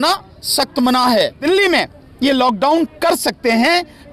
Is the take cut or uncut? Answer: cut